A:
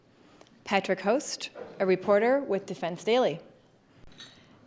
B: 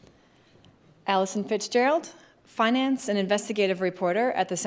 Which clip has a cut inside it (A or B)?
B